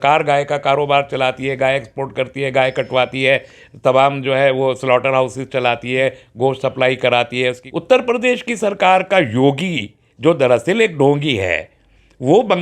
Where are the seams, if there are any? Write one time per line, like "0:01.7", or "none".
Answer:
0:07.6